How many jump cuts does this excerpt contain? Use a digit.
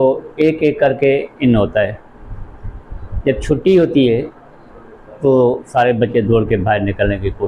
0